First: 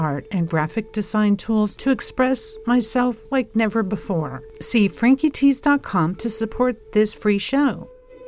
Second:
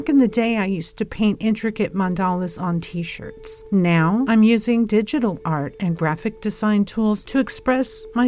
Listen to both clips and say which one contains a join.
first; 1 cut; at 4.4 s

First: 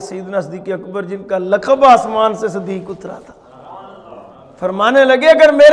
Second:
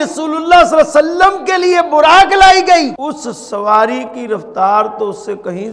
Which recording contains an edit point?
second; 1 cut; at 3.0 s

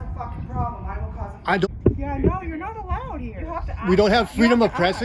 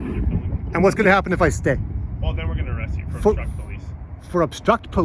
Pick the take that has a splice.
first; 1 cut; at 1.7 s

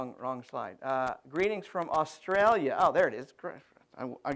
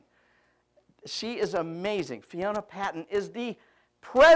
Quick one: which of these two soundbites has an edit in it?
second; 1 cut; at 2.1 s

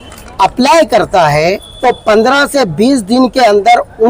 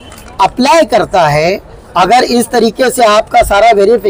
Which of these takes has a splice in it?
first; 1 cut; at 1.7 s

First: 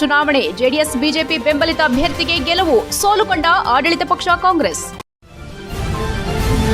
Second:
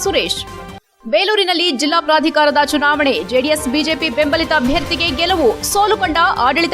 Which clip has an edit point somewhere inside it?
first; 1 cut; at 5.1 s

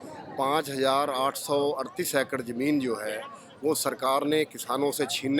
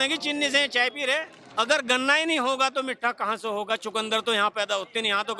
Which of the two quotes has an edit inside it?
second; 1 cut; at 1.4 s

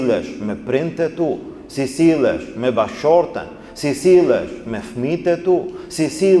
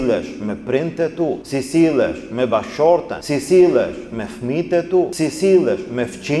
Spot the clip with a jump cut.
second; 3 cuts; at 1.4 s, 3.2 s, 5.1 s

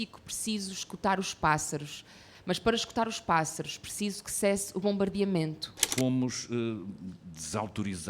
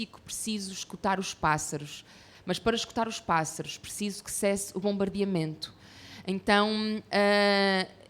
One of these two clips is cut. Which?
first; 1 cut; at 5.9 s

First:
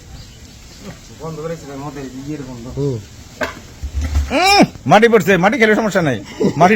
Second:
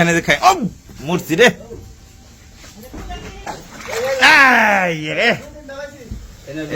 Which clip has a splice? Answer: second; 1 cut; at 3.5 s

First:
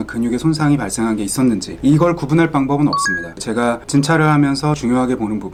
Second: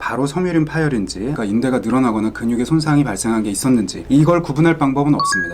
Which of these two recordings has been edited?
second; 1 cut; at 1.4 s

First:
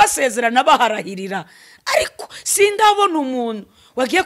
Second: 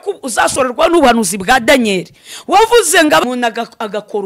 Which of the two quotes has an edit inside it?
second; 1 cut; at 3.2 s

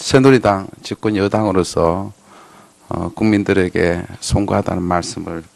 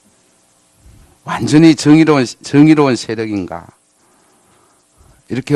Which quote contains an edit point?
second; 1 cut; at 4.0 s

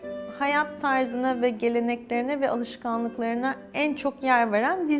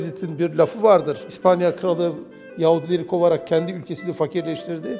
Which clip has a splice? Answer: second; 1 cut; at 1.3 s

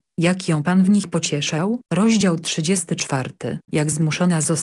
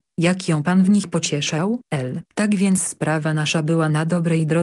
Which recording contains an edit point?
first; 1 cut; at 1.8 s

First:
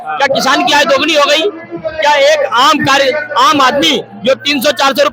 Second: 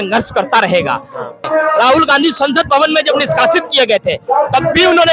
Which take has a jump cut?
second; 1 cut; at 1.5 s

